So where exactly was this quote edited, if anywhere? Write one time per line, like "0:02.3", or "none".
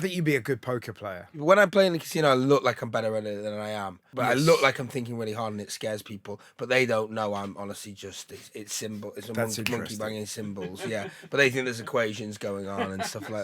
0:01.4
0:04.0